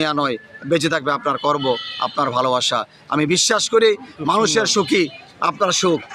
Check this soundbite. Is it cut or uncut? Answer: uncut